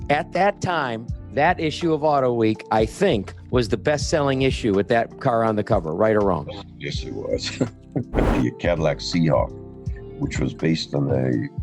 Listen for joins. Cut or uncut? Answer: cut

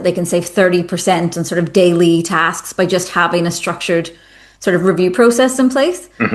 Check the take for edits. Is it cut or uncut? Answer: uncut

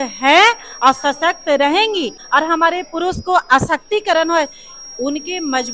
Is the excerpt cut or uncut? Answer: cut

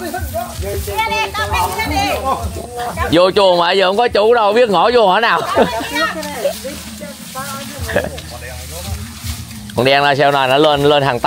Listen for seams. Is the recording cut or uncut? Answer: uncut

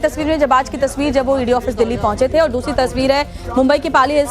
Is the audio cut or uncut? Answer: uncut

